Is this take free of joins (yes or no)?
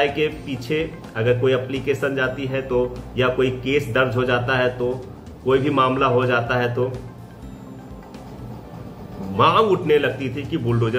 yes